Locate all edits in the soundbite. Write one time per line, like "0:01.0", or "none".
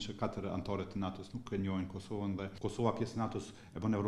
0:02.5